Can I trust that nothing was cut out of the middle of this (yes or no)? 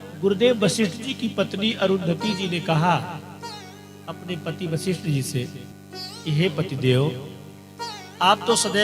yes